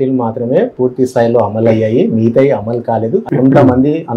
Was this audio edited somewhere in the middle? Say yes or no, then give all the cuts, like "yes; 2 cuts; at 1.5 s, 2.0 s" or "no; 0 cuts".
yes; 1 cut; at 3.2 s